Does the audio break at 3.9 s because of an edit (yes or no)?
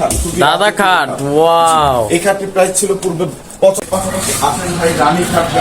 yes